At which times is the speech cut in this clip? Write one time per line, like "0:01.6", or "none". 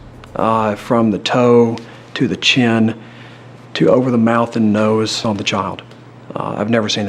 0:05.2